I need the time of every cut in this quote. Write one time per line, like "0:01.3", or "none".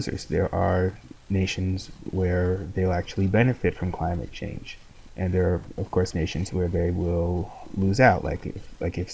0:07.3